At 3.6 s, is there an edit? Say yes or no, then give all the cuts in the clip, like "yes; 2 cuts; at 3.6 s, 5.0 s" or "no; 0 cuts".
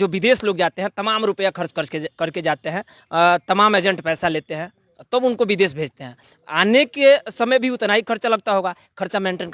no; 0 cuts